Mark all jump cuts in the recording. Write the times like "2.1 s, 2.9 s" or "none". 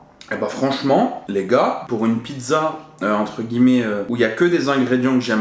none